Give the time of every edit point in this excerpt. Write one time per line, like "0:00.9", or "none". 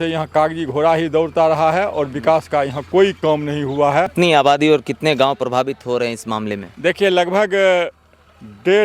0:04.1

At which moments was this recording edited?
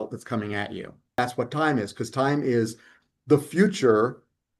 0:01.2

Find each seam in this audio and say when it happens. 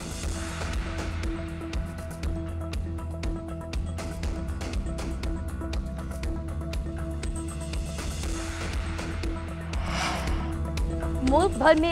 0:09.9

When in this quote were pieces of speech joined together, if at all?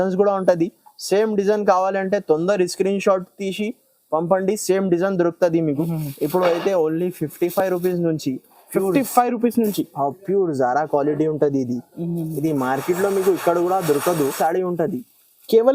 0:05.9
0:14.3

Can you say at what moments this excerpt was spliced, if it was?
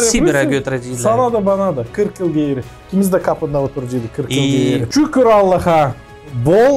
0:02.7
0:04.9

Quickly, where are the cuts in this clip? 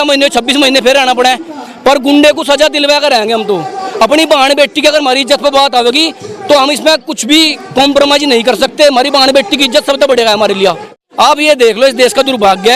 0:11.0

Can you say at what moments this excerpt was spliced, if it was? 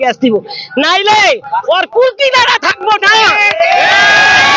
none

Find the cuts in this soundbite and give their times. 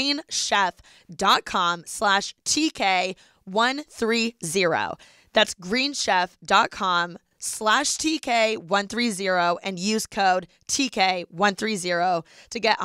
none

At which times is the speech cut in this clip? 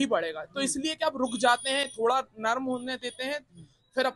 none

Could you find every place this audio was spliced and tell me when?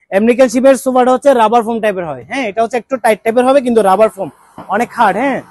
none

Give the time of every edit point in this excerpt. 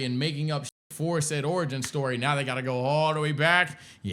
none

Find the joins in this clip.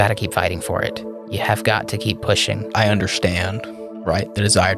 0:02.6

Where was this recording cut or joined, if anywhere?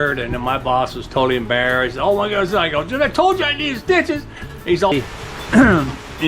0:04.9

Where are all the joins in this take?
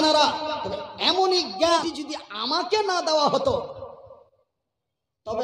0:01.9

